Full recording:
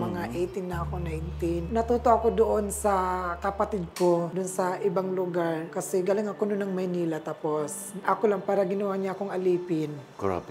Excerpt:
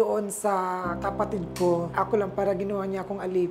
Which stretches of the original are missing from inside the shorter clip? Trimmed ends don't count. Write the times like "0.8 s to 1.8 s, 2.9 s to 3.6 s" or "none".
4.3 s to 8.0 s